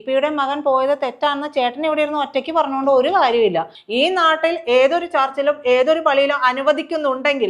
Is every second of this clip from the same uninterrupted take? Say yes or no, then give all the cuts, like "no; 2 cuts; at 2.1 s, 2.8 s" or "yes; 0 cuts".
no; 1 cut; at 3.8 s